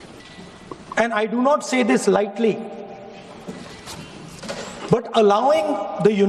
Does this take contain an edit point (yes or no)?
no